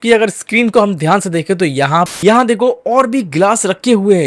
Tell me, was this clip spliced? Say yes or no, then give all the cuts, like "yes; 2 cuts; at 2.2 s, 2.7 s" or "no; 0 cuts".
yes; 1 cut; at 2.1 s